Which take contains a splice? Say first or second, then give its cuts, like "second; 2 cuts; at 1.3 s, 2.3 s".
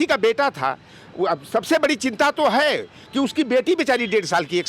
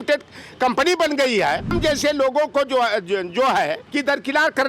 second; 2 cuts; at 1.8 s, 3.8 s